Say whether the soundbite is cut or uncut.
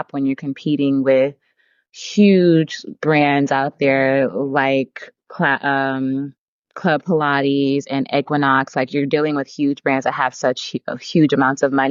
uncut